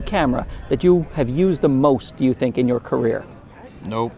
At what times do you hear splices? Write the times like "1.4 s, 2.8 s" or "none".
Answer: none